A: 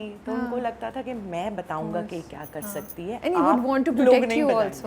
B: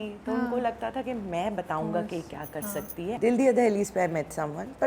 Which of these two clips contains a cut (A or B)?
B